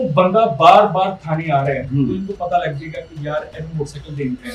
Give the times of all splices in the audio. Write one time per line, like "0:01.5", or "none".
none